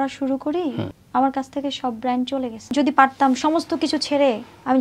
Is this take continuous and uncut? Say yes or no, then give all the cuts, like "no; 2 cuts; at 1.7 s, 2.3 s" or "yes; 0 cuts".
no; 2 cuts; at 0.9 s, 2.7 s